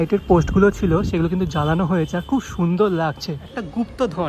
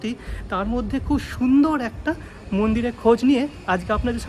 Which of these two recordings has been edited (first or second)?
first